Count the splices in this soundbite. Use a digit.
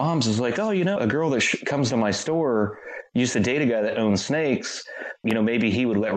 2